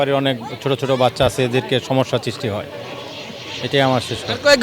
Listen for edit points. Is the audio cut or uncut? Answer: uncut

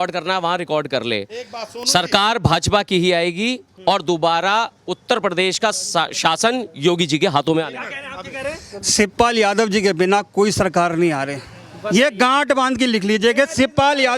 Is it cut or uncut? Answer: uncut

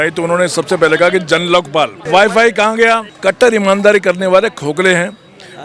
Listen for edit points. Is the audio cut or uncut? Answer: cut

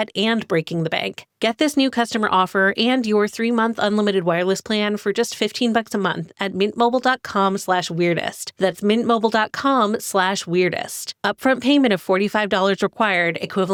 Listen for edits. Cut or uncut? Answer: uncut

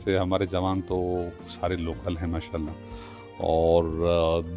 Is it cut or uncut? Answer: uncut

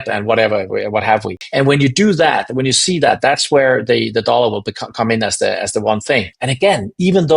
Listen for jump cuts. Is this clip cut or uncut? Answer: cut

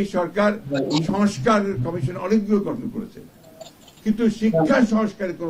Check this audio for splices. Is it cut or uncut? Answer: uncut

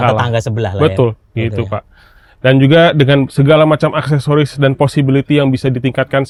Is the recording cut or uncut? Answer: uncut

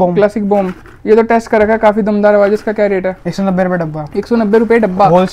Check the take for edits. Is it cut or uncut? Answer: uncut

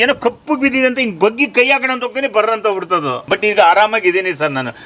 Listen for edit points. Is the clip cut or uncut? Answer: cut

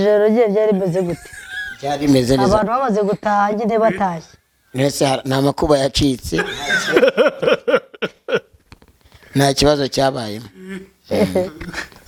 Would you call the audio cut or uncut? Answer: uncut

